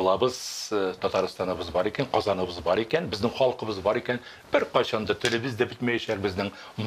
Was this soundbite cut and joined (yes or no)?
no